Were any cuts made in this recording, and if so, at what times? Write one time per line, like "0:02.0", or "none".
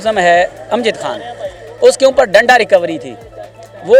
none